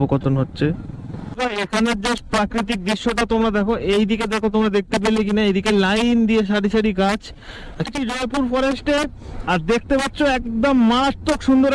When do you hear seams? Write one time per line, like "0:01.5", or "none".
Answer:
0:07.8